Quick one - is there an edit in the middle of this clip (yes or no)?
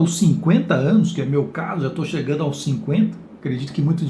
no